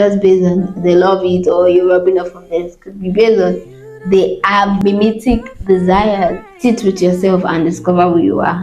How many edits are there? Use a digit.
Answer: 2